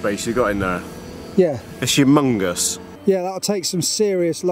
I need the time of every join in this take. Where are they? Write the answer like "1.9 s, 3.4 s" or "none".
2.9 s

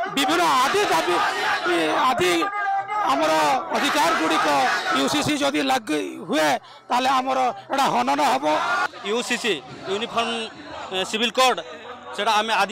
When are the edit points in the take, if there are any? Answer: 8.8 s

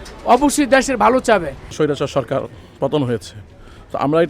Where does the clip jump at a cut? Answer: 1.7 s

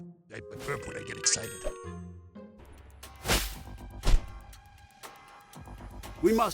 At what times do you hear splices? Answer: 2.5 s

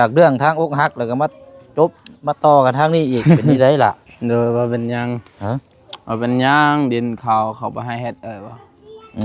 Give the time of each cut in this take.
none

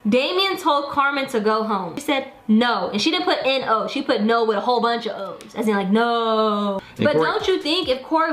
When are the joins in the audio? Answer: 1.9 s, 6.8 s

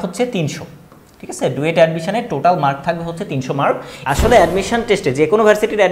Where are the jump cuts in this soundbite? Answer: 4.0 s

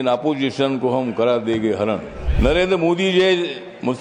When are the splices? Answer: 2.2 s

